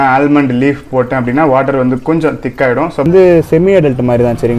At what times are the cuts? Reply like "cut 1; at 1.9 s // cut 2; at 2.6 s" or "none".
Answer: cut 1; at 3.1 s